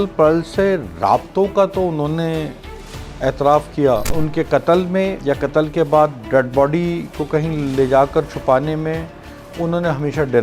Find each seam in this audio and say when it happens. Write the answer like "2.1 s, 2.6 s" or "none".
4.1 s, 5.2 s